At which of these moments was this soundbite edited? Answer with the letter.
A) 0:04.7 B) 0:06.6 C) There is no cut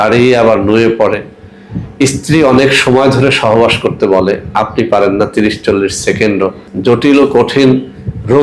B